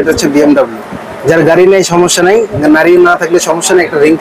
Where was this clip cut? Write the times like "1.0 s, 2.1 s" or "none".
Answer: none